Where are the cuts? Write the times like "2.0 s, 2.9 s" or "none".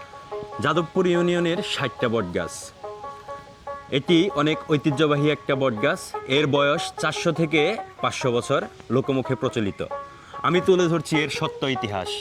none